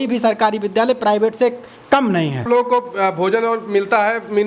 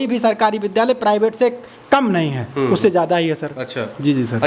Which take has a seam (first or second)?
first